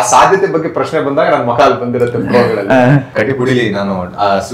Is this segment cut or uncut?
cut